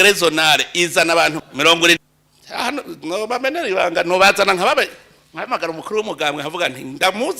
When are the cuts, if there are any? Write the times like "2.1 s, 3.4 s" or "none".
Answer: 2.0 s